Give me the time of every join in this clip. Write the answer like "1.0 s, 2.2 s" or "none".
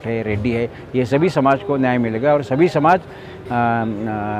none